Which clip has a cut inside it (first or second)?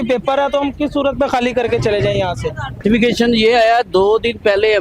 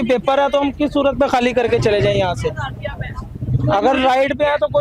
first